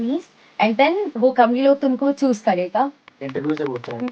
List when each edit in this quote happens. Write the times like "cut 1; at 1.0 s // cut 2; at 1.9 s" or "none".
cut 1; at 3.0 s